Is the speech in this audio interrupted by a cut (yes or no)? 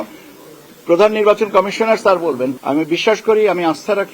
yes